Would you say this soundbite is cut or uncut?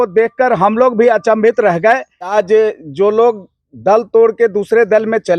cut